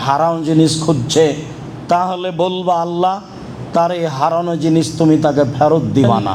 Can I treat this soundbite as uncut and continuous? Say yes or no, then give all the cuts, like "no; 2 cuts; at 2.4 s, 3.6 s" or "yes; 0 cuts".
yes; 0 cuts